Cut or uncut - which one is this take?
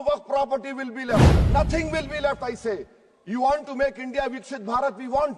cut